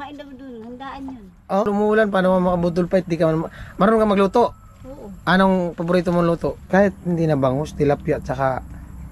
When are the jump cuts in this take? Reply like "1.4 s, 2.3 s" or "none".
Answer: 1.7 s, 6.6 s